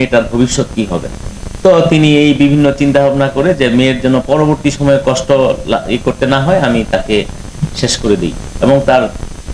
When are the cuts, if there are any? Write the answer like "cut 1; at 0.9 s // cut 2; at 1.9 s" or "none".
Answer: none